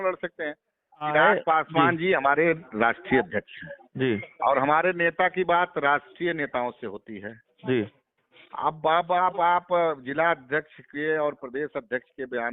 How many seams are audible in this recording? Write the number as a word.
one